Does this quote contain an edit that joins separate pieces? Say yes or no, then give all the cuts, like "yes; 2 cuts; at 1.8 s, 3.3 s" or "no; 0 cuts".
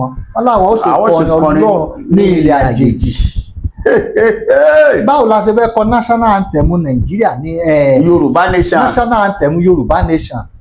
no; 0 cuts